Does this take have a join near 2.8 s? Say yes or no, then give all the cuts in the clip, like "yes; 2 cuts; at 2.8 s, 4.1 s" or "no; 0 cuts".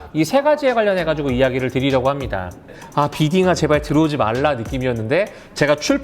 yes; 1 cut; at 2.8 s